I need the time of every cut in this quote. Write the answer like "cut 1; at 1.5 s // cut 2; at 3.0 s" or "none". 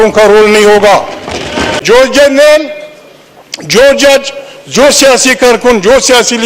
cut 1; at 1.8 s